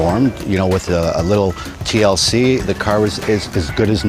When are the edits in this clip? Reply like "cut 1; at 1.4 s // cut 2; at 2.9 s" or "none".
none